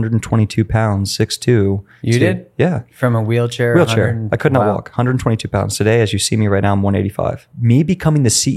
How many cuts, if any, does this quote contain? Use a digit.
1